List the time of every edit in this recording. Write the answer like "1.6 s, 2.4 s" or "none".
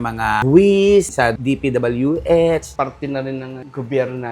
1.1 s, 2.7 s